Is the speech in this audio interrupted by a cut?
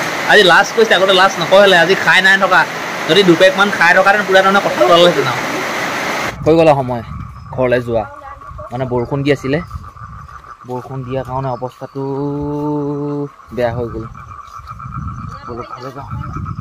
no; 0 cuts

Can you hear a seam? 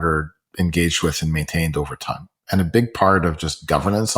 no; 0 cuts

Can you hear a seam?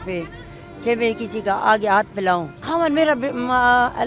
yes; 1 cut; at 2.6 s

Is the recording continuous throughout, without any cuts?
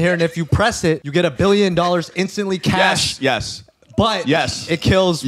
no; 1 cut; at 1.0 s

